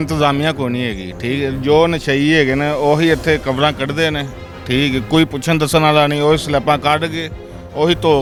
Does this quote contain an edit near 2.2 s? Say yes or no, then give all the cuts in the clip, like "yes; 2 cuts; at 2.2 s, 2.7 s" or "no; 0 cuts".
no; 0 cuts